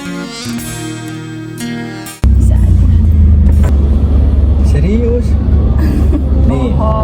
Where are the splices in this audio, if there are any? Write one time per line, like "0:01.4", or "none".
0:03.7